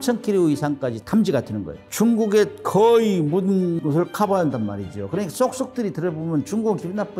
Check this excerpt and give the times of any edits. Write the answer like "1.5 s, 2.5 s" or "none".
1.0 s, 1.9 s, 3.8 s